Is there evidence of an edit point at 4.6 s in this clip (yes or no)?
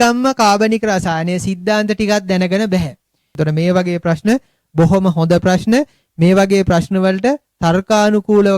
no